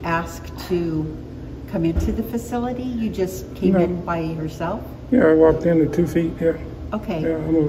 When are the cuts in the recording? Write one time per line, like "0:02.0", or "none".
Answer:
none

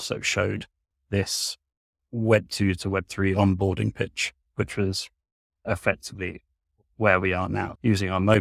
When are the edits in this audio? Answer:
none

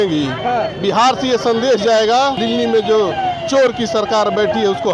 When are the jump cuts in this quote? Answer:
0:02.4

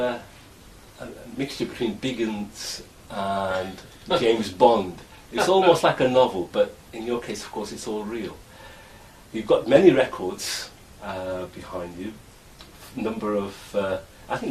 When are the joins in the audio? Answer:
0:02.8

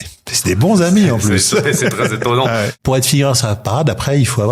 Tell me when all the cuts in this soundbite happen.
0:02.8

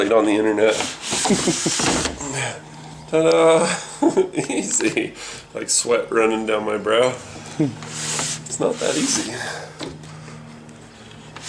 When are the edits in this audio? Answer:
none

